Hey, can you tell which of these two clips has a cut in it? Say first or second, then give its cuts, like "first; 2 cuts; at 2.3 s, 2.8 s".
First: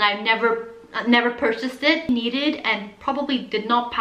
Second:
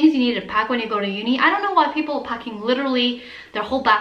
first; 1 cut; at 2.0 s